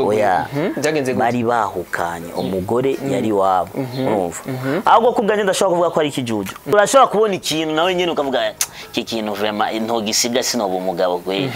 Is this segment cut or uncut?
cut